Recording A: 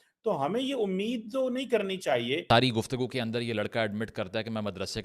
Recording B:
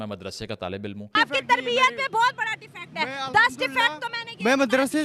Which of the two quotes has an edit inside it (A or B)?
A